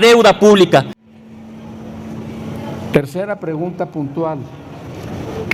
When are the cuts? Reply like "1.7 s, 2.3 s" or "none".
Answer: 0.9 s